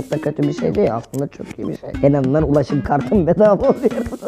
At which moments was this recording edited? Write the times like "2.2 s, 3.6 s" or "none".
1.9 s